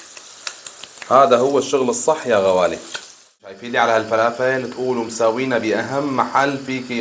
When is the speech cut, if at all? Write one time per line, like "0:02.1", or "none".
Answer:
0:03.6

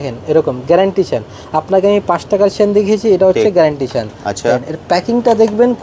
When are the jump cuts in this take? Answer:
none

